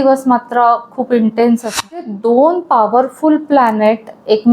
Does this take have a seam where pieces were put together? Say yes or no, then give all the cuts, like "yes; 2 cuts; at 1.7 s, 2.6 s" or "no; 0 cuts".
yes; 1 cut; at 2.0 s